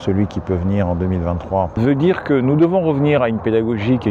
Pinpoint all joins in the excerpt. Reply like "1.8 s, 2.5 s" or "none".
1.7 s